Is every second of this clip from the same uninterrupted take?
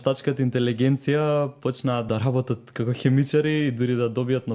no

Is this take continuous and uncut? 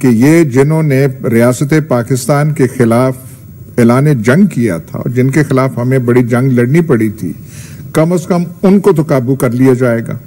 yes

